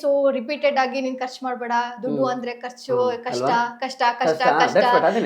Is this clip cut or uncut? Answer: uncut